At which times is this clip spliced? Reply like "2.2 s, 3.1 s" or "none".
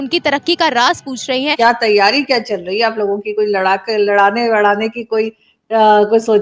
1.5 s

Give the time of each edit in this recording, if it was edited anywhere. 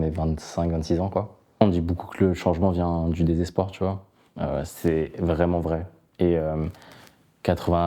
1.6 s

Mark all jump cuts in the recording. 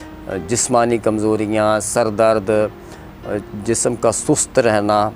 none

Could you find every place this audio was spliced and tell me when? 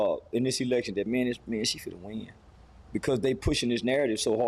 none

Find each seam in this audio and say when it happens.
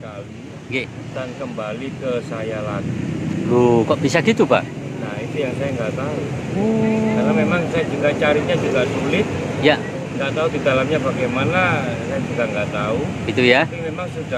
none

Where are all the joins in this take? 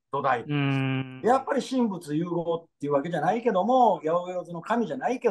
1.1 s, 4.0 s

